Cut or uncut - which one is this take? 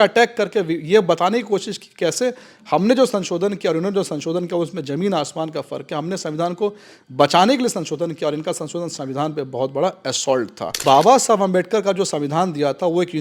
cut